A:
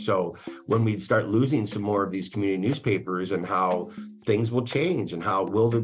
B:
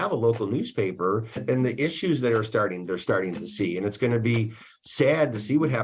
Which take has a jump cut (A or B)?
B